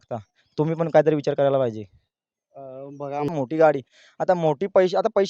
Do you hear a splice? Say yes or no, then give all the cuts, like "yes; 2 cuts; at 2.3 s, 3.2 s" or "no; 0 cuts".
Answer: yes; 1 cut; at 3.3 s